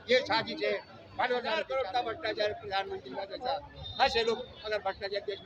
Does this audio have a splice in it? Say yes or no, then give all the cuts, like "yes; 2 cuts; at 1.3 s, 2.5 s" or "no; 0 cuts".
yes; 1 cut; at 1.6 s